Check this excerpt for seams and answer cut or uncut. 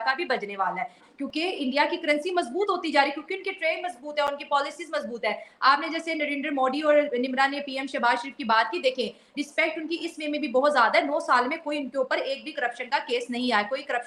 uncut